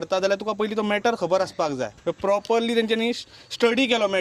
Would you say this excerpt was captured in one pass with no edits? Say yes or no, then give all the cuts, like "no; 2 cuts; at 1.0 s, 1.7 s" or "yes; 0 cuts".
no; 1 cut; at 1.9 s